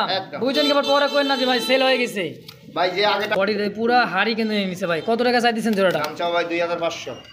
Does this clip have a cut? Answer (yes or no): yes